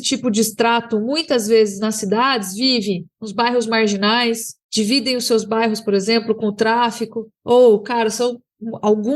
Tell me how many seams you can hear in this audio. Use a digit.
1